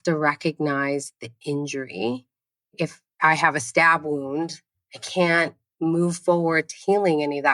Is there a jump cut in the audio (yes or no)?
yes